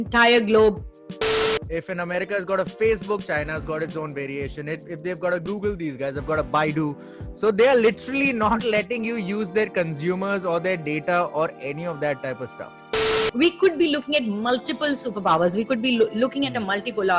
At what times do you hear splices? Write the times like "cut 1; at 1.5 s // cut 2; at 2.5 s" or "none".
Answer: cut 1; at 1.4 s // cut 2; at 13.2 s